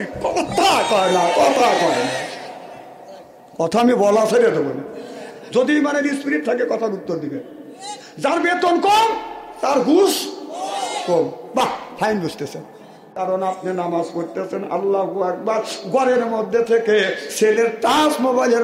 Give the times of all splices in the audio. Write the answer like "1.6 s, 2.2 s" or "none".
13.1 s, 17.3 s